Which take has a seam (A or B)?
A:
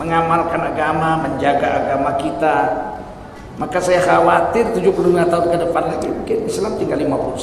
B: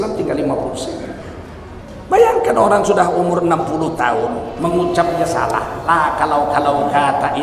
B